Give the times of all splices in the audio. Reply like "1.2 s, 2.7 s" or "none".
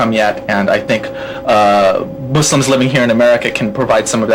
none